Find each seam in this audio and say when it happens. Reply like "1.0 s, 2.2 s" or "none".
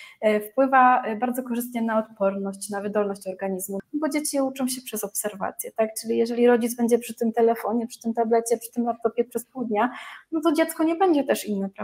3.8 s

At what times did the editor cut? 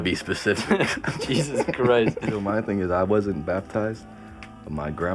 2.4 s

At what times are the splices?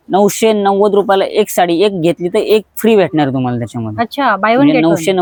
none

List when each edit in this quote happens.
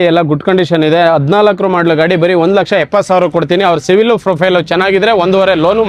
none

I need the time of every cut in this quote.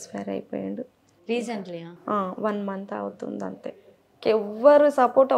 4.2 s

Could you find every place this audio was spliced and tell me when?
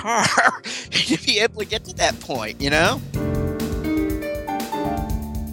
3.0 s

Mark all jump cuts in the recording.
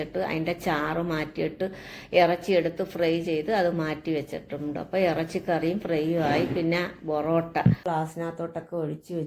7.8 s

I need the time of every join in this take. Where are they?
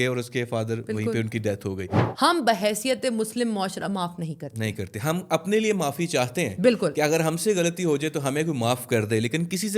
2.0 s

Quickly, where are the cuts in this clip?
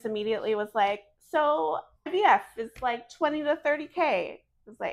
2.1 s

